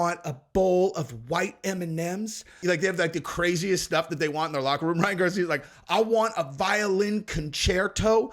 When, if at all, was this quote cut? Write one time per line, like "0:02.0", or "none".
0:02.6